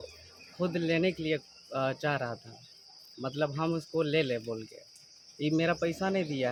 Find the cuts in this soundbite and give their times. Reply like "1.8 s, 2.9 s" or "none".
none

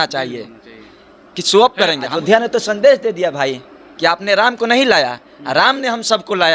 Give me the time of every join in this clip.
2.1 s

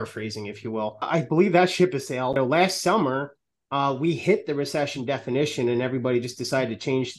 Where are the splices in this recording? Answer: 1.1 s, 2.4 s

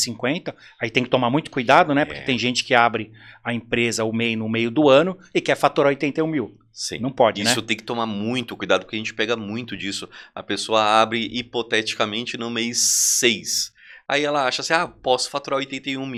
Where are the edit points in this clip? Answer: none

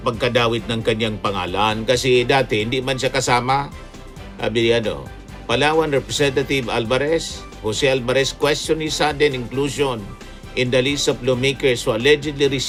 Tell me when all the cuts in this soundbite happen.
none

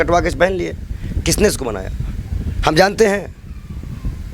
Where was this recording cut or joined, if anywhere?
none

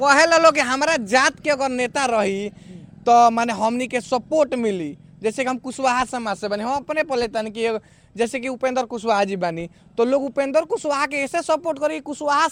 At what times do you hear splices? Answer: none

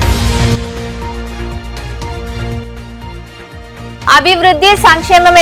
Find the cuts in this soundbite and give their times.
none

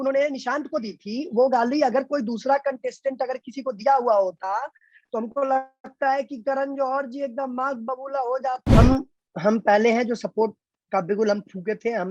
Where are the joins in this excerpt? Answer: 8.6 s

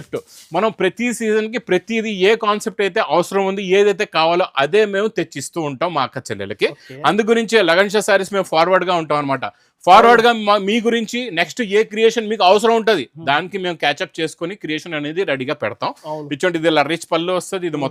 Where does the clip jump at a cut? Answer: none

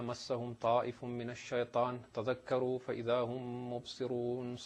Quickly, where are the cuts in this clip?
none

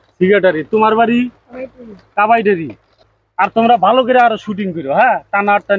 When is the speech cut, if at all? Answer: 2.9 s

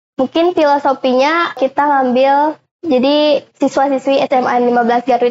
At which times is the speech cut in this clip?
1.6 s

